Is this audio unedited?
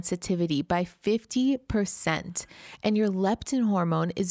yes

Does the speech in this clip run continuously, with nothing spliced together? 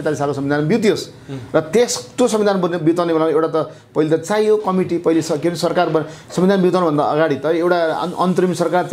yes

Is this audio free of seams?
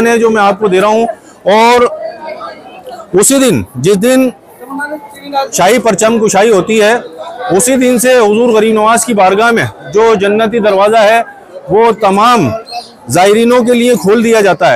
yes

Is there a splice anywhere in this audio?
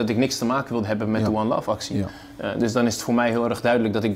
no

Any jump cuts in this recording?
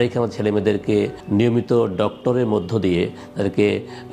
yes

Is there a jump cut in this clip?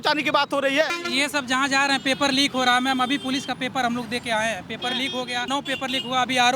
yes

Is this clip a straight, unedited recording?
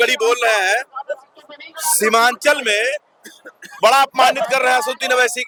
yes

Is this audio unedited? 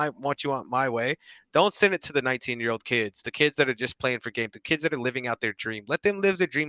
yes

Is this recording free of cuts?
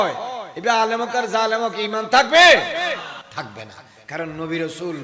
no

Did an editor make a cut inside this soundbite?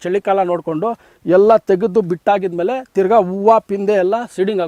no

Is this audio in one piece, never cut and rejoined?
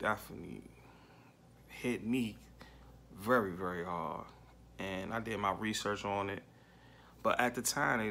yes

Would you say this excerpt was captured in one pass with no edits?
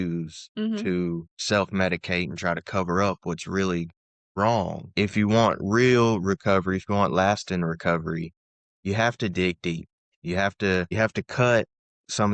no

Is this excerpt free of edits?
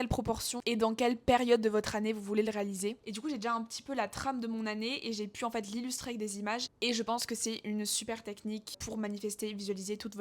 no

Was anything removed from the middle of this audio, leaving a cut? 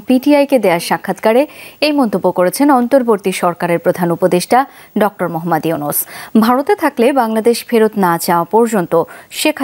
no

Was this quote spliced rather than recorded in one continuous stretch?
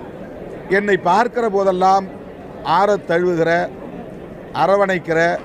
no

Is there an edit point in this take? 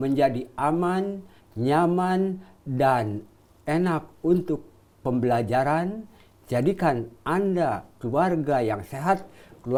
no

